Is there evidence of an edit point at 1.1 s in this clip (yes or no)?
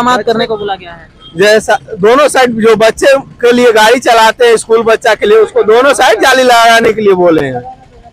no